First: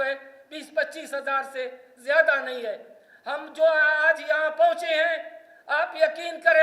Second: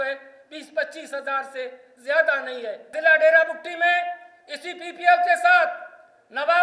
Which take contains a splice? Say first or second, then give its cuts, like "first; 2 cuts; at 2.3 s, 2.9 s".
second; 1 cut; at 2.9 s